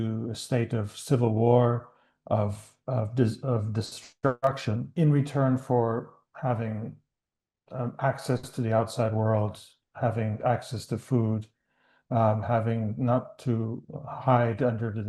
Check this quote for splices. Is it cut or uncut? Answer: cut